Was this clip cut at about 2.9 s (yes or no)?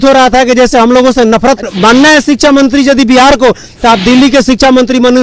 no